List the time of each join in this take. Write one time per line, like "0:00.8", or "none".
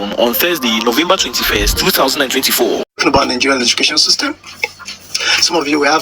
0:02.9